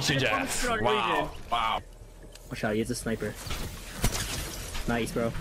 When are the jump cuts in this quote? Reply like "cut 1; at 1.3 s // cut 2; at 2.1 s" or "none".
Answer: cut 1; at 1.8 s